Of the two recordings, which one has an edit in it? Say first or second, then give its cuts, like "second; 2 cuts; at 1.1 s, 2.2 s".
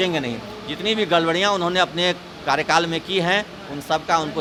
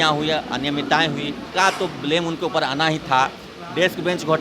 second; 1 cut; at 1.4 s